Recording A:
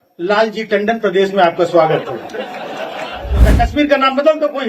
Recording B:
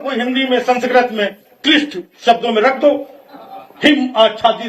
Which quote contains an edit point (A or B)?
A